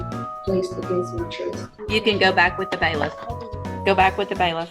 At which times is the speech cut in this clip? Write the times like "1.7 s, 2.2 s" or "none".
1.7 s, 3.7 s